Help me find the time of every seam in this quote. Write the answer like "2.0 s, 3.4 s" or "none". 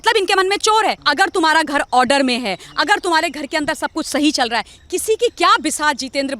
1.0 s